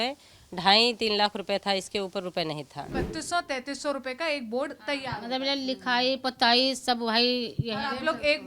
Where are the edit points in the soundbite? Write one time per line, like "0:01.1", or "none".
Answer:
0:02.9